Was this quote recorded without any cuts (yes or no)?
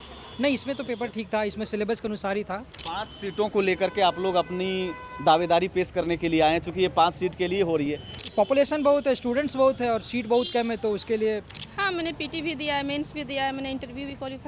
no